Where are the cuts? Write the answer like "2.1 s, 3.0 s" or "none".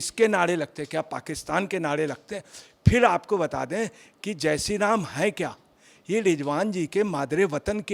none